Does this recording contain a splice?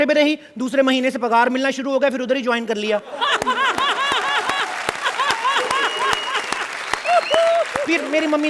no; 0 cuts

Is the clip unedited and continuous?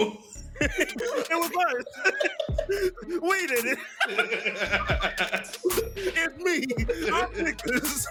yes; 0 cuts

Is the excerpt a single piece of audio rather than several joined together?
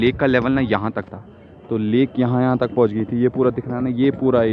yes; 0 cuts

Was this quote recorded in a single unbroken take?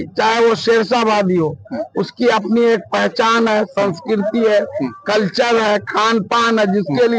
yes; 0 cuts

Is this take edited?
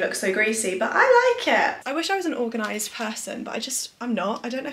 yes; 1 cut; at 1.8 s

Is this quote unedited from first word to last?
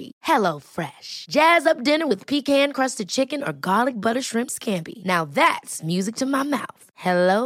yes; 0 cuts

